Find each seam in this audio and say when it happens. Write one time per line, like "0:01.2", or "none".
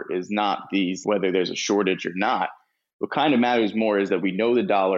0:01.0